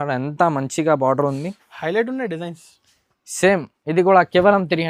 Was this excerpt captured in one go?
yes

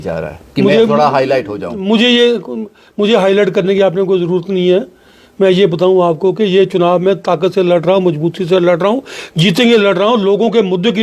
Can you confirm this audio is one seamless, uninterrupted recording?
yes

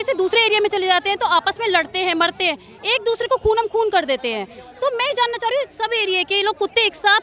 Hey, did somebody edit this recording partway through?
no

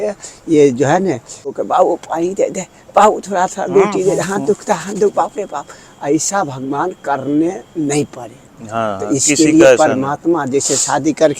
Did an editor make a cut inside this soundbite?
yes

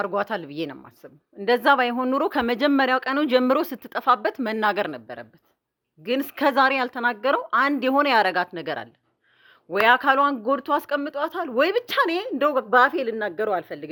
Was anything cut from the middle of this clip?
no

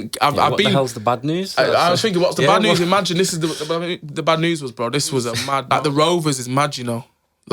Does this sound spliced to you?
yes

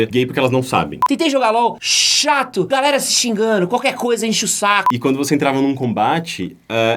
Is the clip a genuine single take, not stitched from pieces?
no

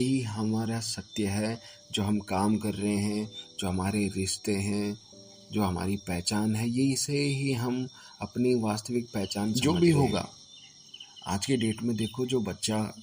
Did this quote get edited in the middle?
yes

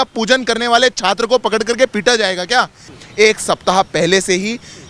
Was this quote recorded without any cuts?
no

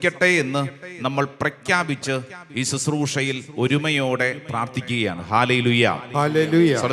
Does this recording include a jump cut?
no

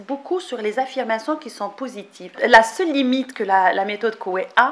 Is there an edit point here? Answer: yes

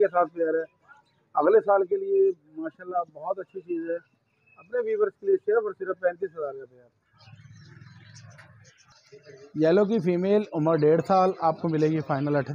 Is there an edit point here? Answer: no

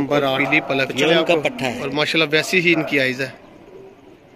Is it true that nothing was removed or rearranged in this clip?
no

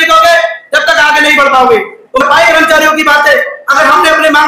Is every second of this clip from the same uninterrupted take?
no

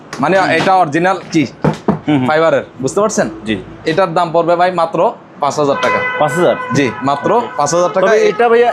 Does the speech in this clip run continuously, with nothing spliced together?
yes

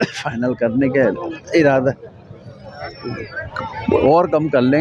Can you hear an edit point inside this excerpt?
yes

